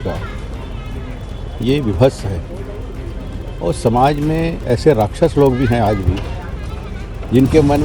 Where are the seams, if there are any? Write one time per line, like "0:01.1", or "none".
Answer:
none